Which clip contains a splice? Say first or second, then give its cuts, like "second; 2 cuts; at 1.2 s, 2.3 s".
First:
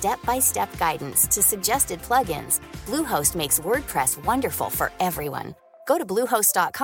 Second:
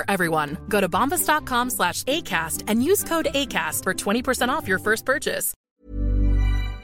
second; 1 cut; at 5.7 s